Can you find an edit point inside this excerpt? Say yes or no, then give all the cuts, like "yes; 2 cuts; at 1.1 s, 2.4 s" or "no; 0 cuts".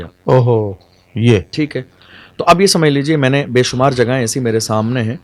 no; 0 cuts